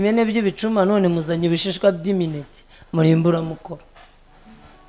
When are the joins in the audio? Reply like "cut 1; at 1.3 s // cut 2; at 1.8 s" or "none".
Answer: none